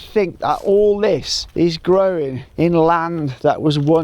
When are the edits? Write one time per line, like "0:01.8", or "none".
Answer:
0:01.4
0:02.4